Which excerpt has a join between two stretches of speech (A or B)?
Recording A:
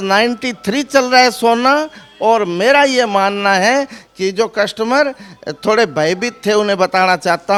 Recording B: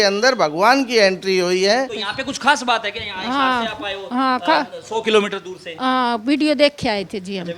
B